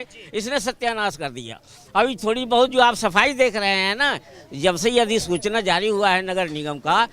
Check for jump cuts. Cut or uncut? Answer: uncut